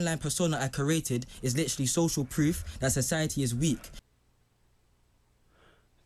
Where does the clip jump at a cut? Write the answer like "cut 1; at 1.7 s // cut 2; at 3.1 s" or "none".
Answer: none